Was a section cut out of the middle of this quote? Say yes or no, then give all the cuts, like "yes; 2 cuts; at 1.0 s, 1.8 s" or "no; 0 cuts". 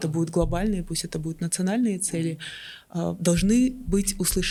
no; 0 cuts